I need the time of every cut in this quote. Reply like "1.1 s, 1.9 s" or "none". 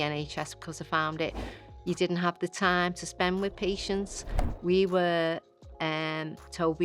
4.3 s